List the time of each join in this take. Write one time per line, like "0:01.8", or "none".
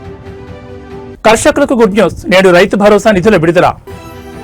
0:01.1